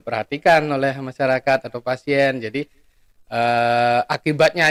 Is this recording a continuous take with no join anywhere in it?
yes; 0 cuts

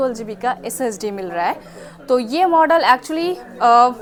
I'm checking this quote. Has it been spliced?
no; 0 cuts

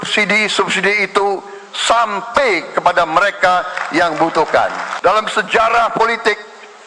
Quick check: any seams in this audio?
yes; 1 cut; at 4.9 s

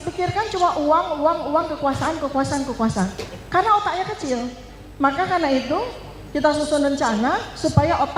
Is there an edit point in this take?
no; 0 cuts

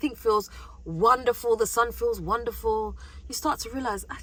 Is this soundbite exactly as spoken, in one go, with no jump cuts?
yes; 0 cuts

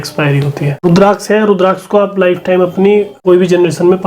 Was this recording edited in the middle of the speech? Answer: yes; 2 cuts; at 0.8 s, 3.1 s

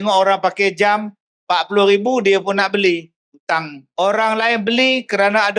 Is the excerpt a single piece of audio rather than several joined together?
no; 1 cut; at 3.8 s

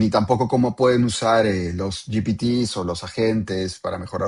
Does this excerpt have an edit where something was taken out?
no; 0 cuts

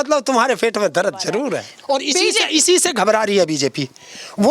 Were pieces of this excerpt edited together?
yes; 1 cut; at 1.7 s

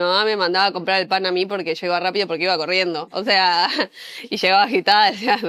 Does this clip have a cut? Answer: no; 0 cuts

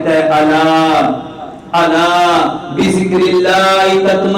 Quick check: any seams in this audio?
no; 0 cuts

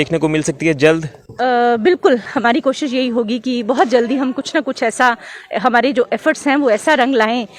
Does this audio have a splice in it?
no; 0 cuts

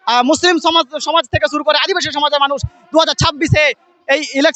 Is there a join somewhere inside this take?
no; 0 cuts

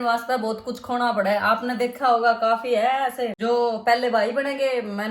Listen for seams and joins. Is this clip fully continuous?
yes; 0 cuts

